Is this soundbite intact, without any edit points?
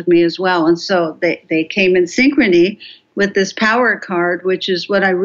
yes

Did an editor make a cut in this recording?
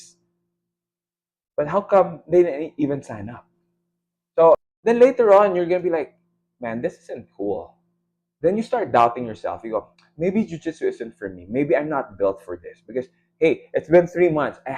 yes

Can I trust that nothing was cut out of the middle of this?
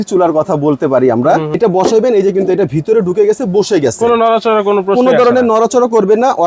no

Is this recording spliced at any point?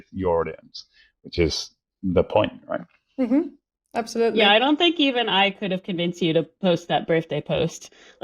no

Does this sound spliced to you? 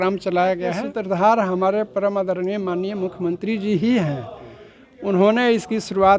yes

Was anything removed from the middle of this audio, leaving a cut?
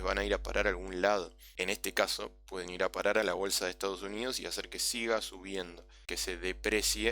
yes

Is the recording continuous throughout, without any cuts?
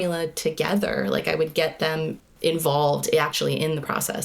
no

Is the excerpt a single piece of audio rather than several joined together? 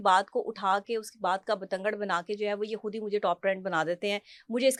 yes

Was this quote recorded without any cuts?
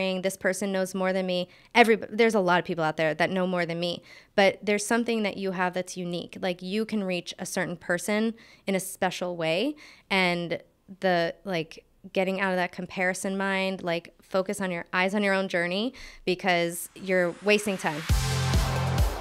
no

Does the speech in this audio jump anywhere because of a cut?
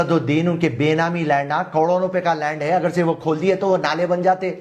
no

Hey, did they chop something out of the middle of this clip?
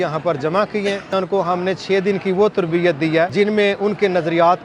yes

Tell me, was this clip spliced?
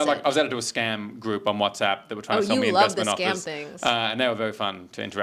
no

